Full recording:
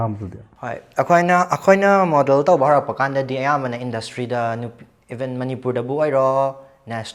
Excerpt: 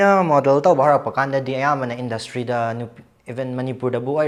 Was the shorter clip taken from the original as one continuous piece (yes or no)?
yes